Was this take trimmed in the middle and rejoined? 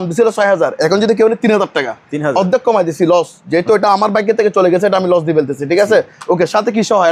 no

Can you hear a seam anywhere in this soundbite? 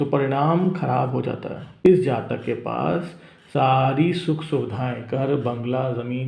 yes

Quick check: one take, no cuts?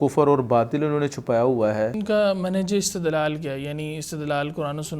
no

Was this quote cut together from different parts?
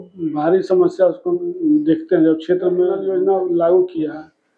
yes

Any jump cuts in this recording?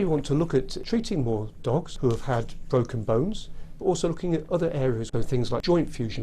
yes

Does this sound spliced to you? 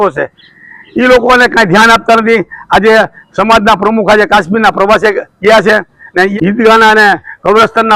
yes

